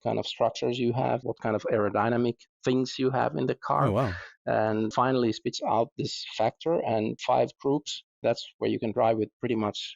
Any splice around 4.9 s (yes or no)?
yes